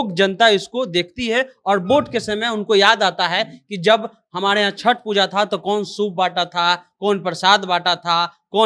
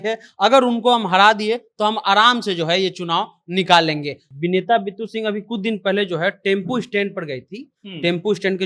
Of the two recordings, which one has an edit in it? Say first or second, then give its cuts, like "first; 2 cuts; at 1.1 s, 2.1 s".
second; 1 cut; at 4.2 s